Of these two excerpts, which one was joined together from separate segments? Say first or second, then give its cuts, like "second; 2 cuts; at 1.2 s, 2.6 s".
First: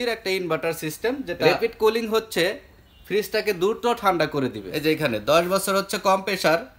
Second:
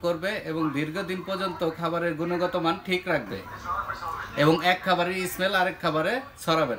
first; 2 cuts; at 1.4 s, 4.7 s